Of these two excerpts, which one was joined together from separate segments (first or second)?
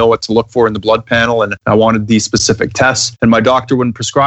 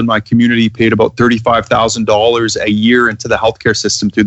first